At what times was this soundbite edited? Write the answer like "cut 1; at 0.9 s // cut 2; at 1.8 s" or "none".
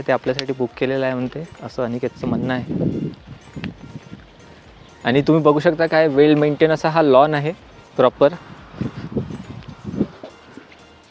none

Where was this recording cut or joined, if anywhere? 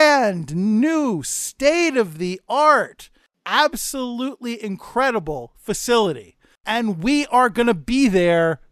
cut 1; at 3.3 s // cut 2; at 6.6 s

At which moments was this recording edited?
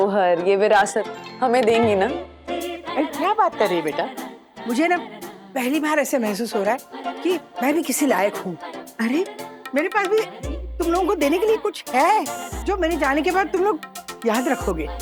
none

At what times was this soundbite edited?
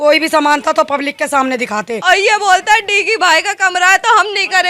cut 1; at 1.9 s

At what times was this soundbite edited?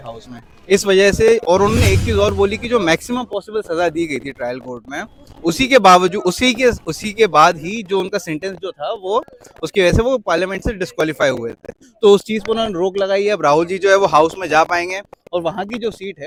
none

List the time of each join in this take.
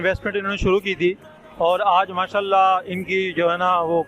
none

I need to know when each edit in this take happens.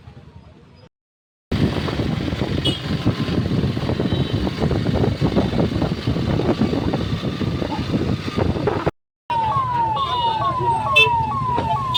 none

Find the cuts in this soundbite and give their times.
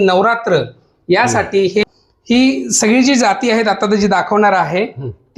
cut 1; at 1.8 s

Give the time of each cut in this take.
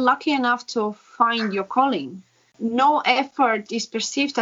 cut 1; at 2.6 s

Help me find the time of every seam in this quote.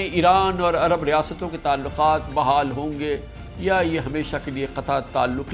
cut 1; at 2.3 s

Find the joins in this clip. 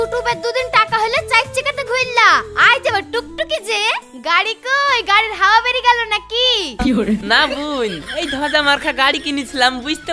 none

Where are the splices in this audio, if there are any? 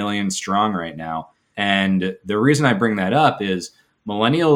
cut 1; at 1.4 s

